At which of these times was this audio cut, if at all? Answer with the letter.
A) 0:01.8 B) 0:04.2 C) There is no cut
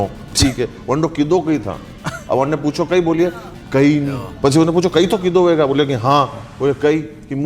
B